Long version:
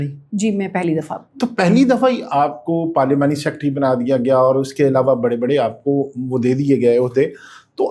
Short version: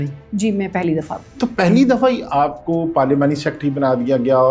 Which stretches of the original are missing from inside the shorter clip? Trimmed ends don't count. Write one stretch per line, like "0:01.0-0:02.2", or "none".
none